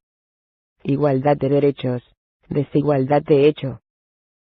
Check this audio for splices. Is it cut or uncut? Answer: uncut